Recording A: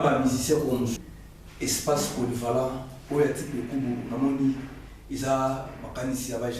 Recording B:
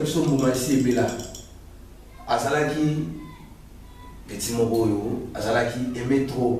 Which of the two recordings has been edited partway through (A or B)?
A